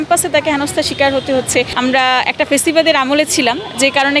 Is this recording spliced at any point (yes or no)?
yes